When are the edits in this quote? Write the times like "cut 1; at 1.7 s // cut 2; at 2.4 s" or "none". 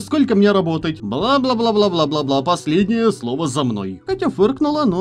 cut 1; at 1.0 s // cut 2; at 3.9 s